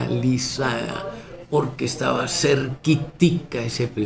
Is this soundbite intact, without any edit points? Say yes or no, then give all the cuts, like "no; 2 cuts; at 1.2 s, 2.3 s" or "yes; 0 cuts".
yes; 0 cuts